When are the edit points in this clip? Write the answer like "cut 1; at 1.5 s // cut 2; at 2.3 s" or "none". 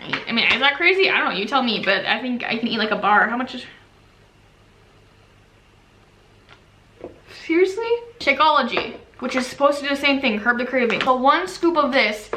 cut 1; at 8.1 s // cut 2; at 11.0 s